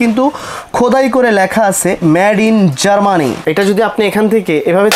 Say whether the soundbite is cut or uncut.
cut